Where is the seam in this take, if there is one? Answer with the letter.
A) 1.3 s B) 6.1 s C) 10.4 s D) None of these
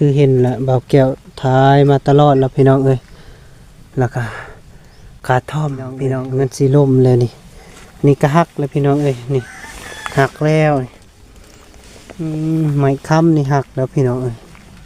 B